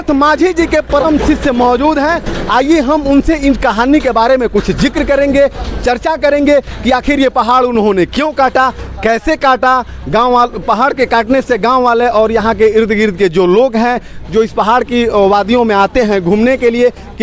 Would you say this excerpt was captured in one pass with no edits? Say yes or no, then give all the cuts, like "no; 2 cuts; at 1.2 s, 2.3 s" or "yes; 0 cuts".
yes; 0 cuts